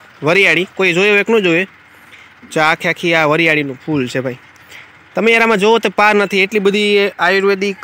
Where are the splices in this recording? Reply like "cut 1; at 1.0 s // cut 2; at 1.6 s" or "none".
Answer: none

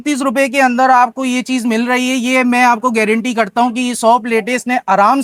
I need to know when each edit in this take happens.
none

